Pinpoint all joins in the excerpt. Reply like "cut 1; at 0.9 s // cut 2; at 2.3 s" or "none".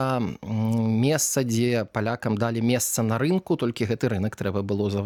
none